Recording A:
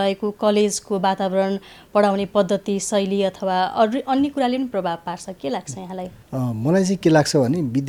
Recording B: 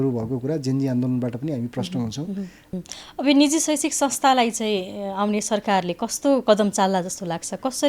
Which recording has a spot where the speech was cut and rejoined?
B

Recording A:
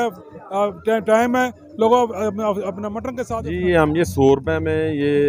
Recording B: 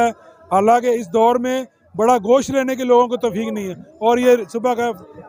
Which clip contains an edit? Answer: A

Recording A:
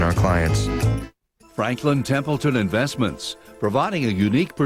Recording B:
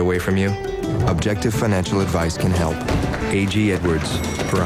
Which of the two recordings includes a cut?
A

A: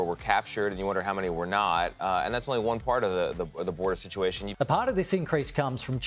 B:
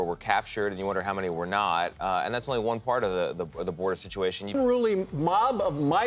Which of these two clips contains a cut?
B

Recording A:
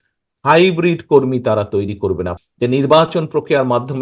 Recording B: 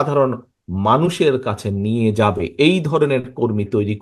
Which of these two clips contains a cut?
A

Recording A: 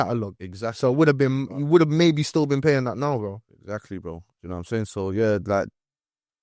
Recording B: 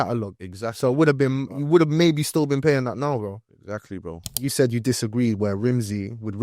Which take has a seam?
B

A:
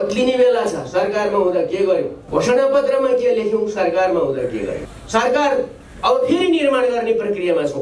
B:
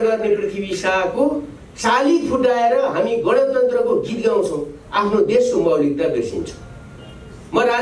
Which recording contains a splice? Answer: A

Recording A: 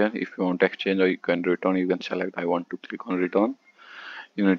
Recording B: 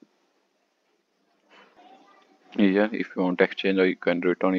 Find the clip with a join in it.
B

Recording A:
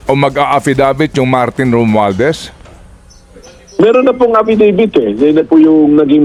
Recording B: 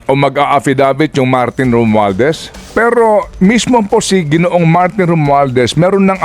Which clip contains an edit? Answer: B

